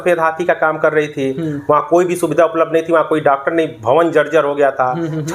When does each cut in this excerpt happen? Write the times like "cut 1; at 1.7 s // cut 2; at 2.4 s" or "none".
none